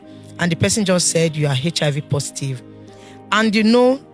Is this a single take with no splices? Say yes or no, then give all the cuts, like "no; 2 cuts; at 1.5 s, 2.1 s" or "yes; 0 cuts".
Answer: yes; 0 cuts